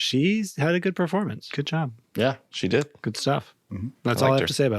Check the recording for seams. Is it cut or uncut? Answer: cut